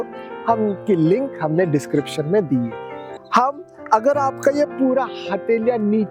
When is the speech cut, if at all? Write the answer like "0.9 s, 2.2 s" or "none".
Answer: 3.1 s